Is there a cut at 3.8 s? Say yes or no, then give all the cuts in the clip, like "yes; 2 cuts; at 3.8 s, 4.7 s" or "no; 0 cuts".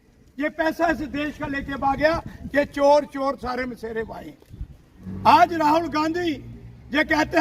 no; 1 cut; at 5.0 s